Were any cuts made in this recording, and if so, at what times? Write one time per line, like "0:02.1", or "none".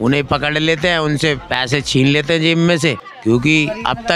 0:03.1